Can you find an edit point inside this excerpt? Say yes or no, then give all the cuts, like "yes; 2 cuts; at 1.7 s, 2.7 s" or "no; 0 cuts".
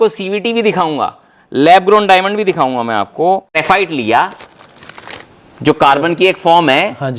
yes; 1 cut; at 3.6 s